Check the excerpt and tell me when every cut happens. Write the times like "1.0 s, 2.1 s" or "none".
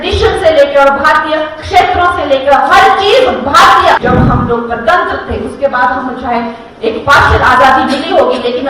4.0 s